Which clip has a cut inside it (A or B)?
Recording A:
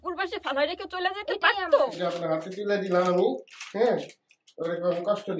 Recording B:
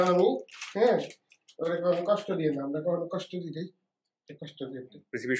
A